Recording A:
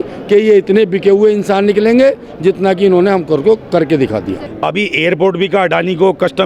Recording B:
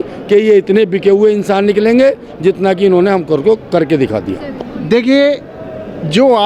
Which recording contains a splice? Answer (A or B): A